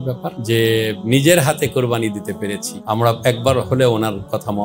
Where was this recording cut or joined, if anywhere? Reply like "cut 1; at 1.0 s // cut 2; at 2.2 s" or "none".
cut 1; at 2.8 s